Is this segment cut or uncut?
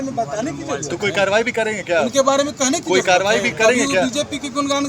uncut